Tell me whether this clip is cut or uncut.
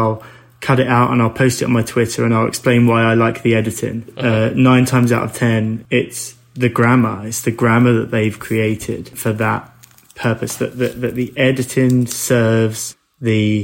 cut